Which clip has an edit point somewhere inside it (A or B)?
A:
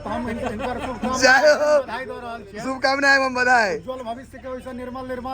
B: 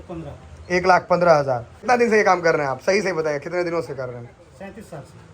B